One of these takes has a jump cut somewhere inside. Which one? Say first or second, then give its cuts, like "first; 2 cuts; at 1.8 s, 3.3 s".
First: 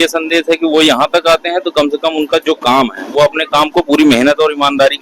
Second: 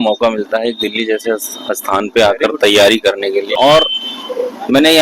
second; 1 cut; at 3.5 s